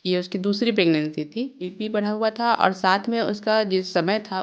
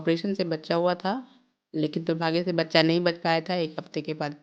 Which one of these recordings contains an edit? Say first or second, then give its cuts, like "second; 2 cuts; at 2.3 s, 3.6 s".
first; 1 cut; at 1.7 s